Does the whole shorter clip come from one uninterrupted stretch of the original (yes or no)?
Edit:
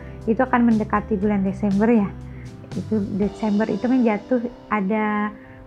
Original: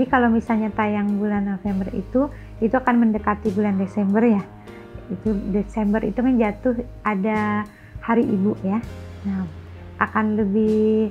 yes